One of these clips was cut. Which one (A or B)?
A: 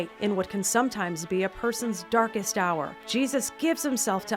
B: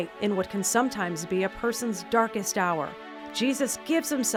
A